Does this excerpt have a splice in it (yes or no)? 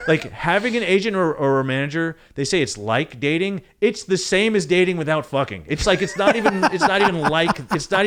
no